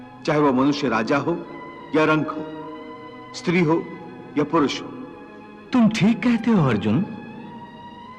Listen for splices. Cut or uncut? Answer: uncut